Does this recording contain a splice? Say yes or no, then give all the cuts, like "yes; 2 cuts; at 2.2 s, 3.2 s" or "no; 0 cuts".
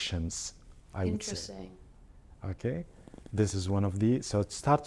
no; 0 cuts